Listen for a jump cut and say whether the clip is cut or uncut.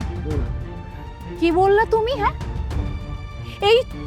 uncut